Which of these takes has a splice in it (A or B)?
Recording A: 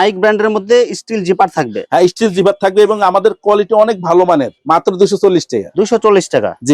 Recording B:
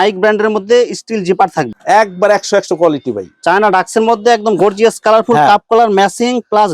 B